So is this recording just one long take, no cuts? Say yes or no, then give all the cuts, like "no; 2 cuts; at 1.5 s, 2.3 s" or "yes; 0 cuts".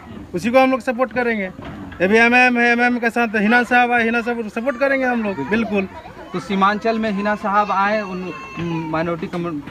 yes; 0 cuts